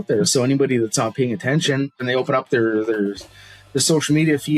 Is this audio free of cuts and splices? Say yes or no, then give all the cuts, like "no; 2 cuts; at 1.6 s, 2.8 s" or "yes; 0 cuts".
no; 1 cut; at 2.0 s